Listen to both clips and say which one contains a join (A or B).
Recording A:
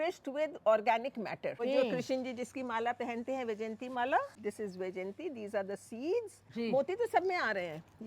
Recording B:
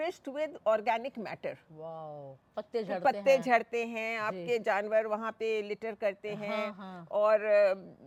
A